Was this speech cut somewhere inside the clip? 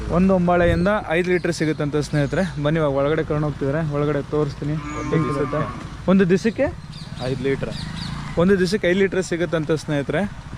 no; 0 cuts

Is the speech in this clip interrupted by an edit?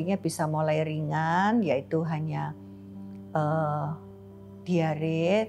no; 0 cuts

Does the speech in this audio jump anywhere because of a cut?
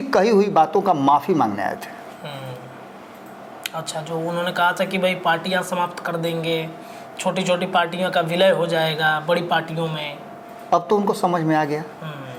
no; 0 cuts

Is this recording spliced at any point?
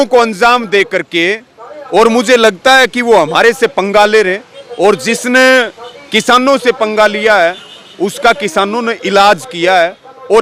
no; 0 cuts

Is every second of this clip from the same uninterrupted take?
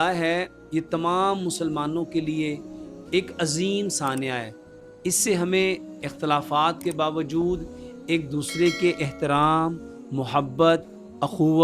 yes; 0 cuts

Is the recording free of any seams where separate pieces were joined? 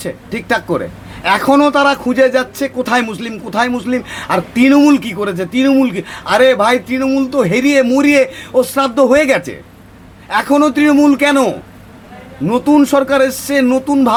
yes; 0 cuts

